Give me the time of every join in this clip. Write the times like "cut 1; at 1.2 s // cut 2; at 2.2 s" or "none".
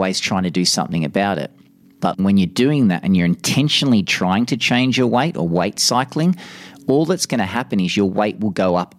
cut 1; at 2.2 s